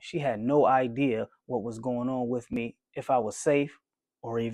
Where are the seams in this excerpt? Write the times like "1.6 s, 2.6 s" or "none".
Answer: none